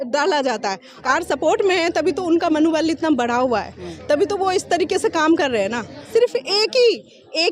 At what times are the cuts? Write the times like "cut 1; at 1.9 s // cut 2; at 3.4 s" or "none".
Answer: cut 1; at 0.9 s // cut 2; at 6.1 s